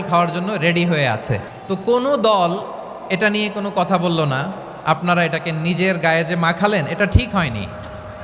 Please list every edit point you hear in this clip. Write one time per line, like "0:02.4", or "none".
0:01.5

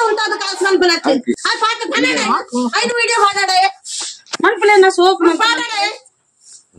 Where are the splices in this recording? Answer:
none

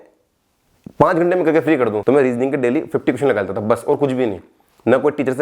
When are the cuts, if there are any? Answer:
0:02.0

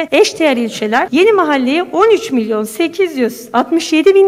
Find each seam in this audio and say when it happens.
0:01.1

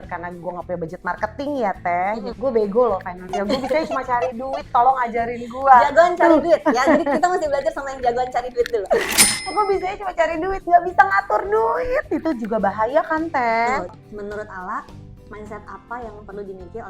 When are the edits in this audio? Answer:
0:02.3
0:13.9

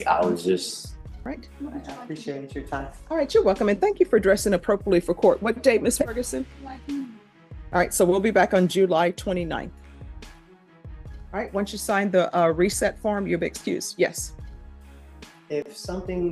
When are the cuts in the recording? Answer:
0:01.2

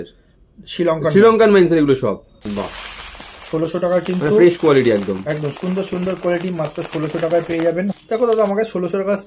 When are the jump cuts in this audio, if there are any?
0:02.3
0:07.9

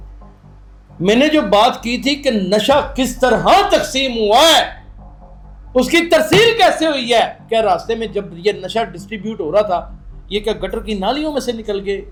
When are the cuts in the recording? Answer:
none

